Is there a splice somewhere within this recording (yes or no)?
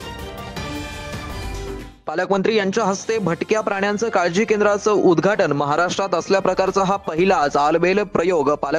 yes